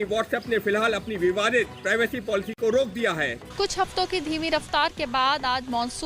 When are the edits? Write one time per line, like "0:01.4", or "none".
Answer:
0:03.4